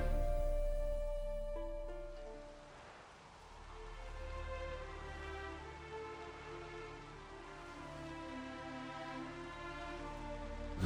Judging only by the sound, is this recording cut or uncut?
uncut